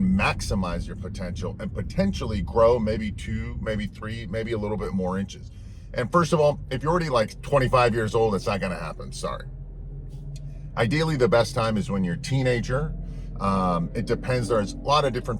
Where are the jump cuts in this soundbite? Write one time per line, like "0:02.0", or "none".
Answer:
none